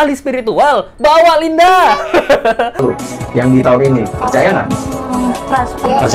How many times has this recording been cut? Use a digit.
1